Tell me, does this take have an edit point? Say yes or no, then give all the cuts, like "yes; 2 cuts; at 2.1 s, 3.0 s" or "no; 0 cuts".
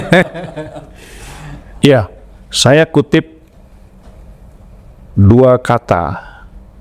yes; 1 cut; at 1.7 s